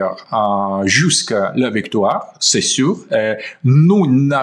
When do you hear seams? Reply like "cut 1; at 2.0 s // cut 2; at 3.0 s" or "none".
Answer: none